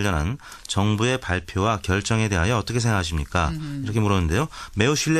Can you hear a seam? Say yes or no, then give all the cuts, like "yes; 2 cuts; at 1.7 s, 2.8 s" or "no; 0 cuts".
yes; 1 cut; at 4.1 s